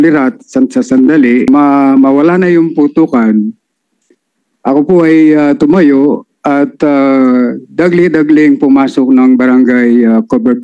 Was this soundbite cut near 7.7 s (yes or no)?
no